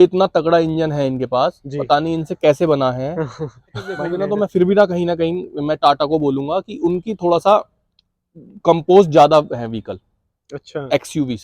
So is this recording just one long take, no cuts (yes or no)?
no